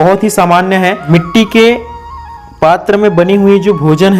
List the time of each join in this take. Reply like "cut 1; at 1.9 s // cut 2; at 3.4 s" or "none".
cut 1; at 1.0 s